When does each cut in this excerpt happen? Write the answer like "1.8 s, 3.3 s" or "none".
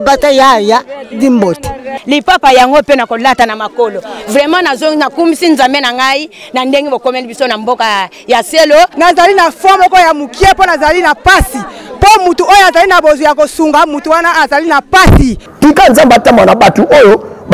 15.4 s